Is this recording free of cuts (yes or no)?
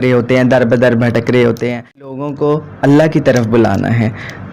no